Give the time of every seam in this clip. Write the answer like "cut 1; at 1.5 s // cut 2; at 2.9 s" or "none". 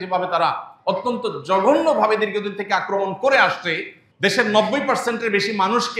cut 1; at 4.0 s